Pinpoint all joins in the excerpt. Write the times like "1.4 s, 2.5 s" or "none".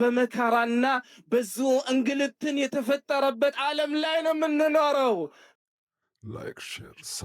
5.6 s